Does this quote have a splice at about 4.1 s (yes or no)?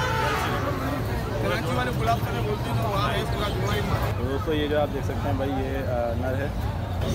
yes